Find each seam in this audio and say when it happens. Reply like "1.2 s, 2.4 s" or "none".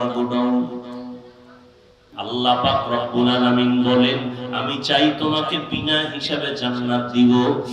2.1 s